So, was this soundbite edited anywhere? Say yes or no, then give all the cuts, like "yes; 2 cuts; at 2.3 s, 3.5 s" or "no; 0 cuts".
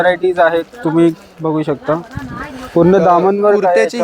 no; 0 cuts